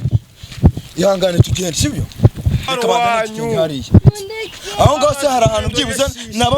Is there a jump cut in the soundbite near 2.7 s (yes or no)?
yes